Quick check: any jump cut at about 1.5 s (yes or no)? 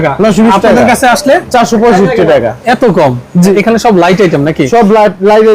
no